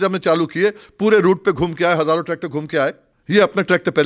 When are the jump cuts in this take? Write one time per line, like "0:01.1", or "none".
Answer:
0:03.1